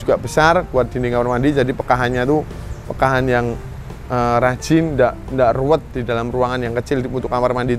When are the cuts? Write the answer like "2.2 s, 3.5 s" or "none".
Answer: none